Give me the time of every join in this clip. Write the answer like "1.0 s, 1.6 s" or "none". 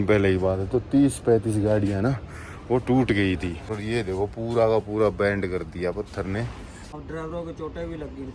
3.7 s, 6.9 s